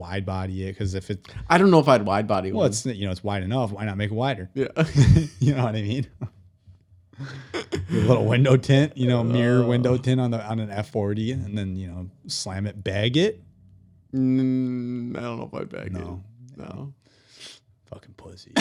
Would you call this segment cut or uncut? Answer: uncut